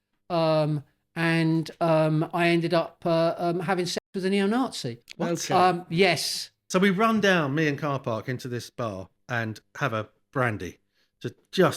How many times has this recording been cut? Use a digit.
1